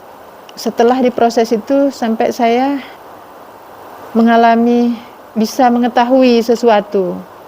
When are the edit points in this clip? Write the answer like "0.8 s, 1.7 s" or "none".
3.0 s